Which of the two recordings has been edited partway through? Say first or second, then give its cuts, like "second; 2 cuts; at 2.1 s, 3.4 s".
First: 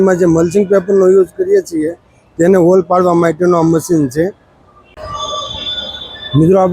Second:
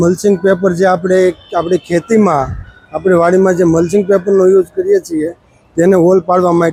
first; 1 cut; at 4.9 s